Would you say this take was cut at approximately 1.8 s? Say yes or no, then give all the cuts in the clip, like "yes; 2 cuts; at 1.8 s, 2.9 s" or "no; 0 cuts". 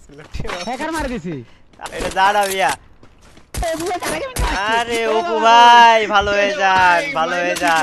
yes; 2 cuts; at 1.8 s, 3.6 s